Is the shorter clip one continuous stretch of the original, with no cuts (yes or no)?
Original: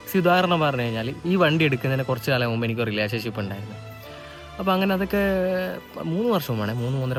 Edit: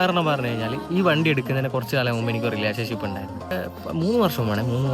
no